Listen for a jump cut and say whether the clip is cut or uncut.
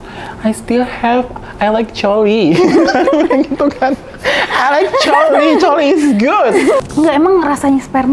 cut